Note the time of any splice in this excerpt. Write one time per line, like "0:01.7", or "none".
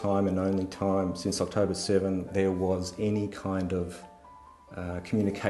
0:02.3